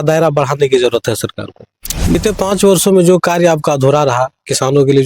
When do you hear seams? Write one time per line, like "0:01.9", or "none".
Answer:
0:02.1